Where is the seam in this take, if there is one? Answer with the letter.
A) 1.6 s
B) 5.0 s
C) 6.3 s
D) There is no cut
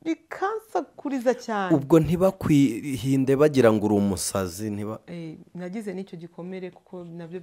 D